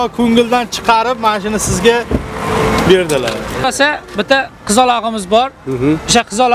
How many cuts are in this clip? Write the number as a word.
one